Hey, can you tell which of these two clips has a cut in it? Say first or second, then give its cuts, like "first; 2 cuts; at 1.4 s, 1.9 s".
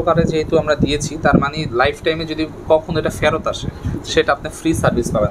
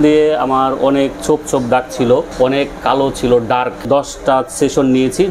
second; 2 cuts; at 2.3 s, 3.8 s